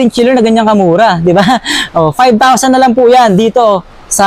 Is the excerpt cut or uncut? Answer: uncut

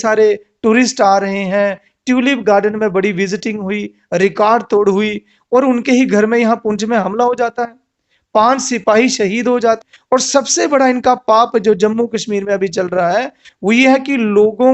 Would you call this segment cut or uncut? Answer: cut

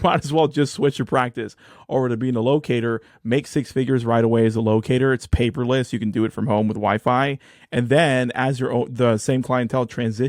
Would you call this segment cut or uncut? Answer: uncut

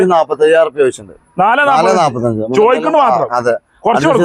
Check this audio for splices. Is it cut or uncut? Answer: uncut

